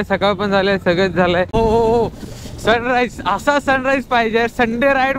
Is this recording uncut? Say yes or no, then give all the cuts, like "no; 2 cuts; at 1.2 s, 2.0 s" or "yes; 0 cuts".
no; 1 cut; at 1.5 s